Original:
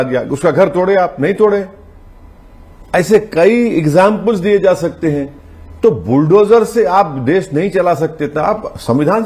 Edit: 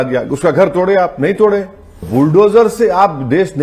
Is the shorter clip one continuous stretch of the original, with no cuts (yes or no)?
no